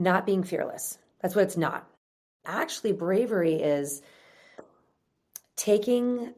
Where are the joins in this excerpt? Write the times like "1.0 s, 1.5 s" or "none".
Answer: 2.4 s